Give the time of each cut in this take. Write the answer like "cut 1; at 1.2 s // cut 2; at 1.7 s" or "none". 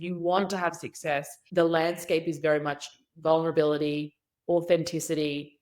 cut 1; at 1.4 s